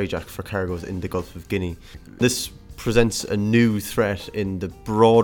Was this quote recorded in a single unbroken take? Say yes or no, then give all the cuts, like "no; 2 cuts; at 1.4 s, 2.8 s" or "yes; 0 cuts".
no; 1 cut; at 2.2 s